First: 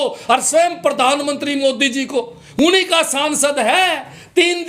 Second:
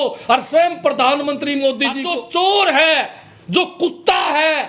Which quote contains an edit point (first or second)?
second